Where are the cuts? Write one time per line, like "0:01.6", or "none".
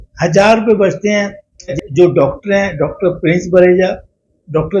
0:01.7